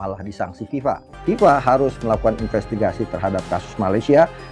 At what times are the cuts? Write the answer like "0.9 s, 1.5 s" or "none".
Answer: 1.2 s